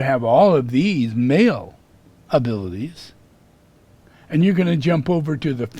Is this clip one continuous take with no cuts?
no; 1 cut; at 4.1 s

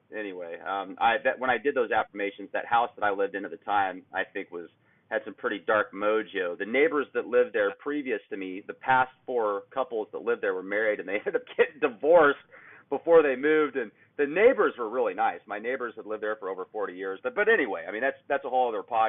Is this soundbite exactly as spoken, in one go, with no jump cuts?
no; 1 cut; at 7.7 s

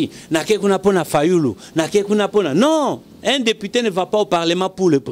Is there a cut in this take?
no; 0 cuts

